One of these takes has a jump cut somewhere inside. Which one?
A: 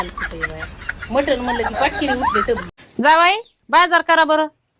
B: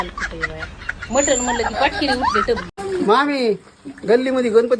B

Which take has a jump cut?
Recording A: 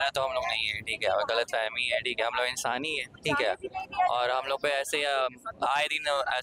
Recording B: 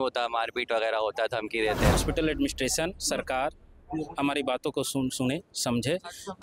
B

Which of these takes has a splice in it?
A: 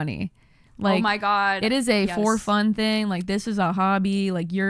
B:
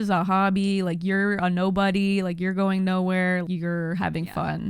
B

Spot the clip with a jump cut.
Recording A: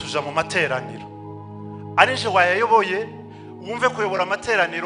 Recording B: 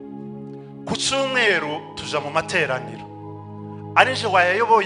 B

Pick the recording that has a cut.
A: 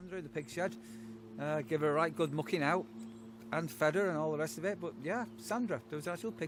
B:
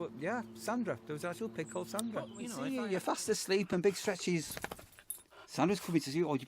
B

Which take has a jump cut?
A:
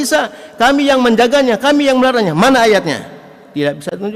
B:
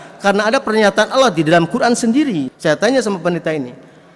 B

